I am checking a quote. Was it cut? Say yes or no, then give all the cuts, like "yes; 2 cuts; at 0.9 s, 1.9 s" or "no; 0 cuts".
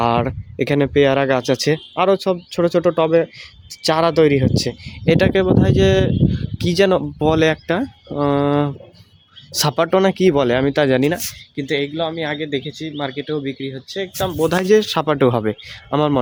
no; 0 cuts